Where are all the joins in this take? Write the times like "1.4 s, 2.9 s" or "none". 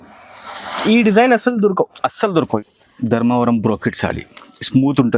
2.6 s